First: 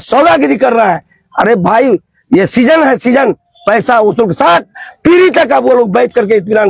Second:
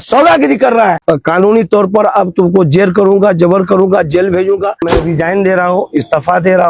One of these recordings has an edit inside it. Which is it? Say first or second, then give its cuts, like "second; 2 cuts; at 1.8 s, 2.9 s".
second; 2 cuts; at 1.0 s, 4.9 s